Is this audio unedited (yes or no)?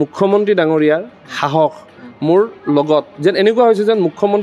yes